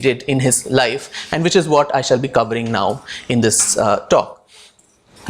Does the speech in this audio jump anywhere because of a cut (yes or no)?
no